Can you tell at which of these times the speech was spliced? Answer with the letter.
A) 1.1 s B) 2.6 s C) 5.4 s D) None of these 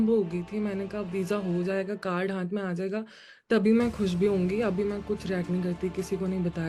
D